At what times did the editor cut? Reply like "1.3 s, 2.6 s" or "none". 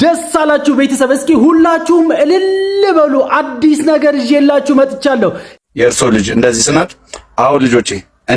5.5 s